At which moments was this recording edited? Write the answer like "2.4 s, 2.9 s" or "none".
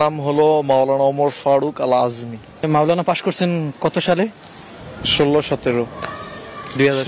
2.6 s